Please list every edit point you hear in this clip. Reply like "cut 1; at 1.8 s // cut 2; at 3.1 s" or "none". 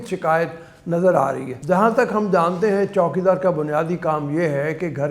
cut 1; at 1.5 s